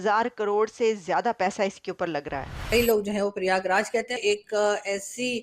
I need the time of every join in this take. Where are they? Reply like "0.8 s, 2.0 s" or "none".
2.6 s, 4.2 s